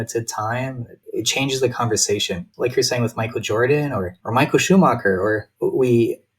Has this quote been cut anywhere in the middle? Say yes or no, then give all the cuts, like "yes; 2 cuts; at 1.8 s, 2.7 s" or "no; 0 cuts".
yes; 4 cuts; at 0.9 s, 2.5 s, 4.2 s, 5.5 s